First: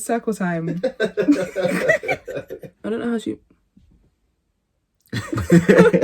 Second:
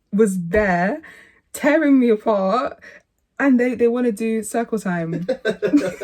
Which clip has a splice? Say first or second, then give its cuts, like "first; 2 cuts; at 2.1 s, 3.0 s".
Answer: first; 1 cut; at 2.7 s